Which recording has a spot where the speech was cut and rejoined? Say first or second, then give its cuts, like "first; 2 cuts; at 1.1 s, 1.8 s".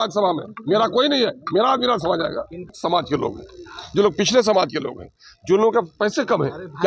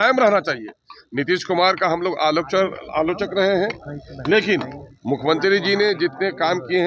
first; 1 cut; at 2.7 s